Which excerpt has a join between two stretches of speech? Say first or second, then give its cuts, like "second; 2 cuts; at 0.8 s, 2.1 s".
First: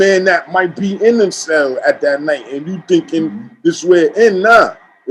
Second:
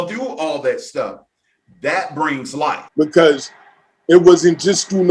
second; 1 cut; at 2.8 s